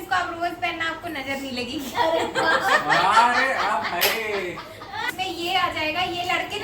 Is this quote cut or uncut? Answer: cut